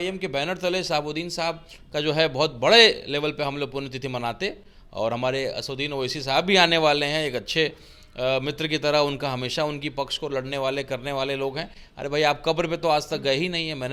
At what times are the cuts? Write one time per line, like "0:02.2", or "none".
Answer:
none